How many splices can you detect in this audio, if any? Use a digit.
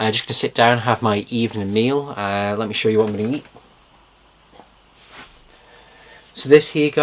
1